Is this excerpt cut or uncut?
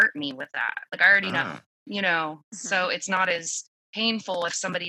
uncut